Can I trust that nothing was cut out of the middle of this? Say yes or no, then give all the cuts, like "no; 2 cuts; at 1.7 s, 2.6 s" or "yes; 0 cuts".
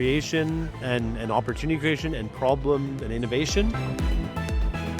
no; 1 cut; at 3.8 s